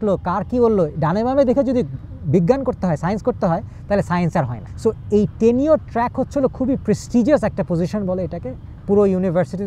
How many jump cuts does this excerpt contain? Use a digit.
0